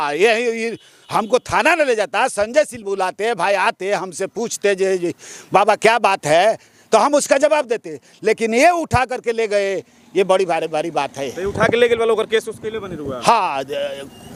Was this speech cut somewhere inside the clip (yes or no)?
no